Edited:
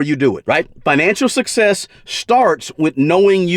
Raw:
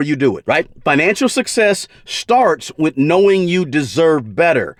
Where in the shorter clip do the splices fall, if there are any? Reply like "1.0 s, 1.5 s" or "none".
none